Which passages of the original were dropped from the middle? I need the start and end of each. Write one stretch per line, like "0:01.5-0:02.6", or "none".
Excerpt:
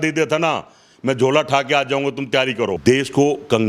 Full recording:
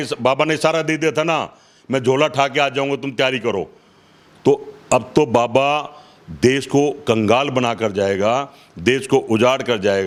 0:03.6-0:06.3